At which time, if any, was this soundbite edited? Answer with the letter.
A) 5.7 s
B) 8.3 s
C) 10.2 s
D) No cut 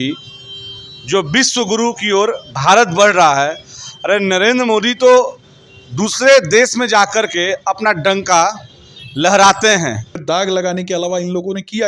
C